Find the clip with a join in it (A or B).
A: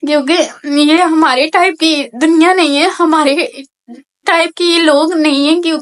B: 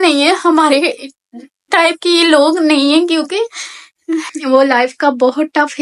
B